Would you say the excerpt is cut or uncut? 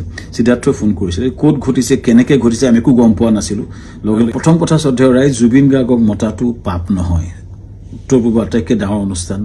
cut